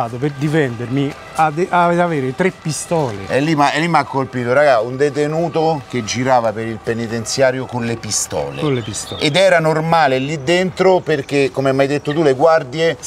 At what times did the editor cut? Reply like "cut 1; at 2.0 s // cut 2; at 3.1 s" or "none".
none